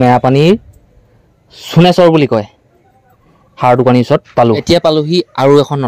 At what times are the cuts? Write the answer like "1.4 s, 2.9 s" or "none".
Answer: 4.6 s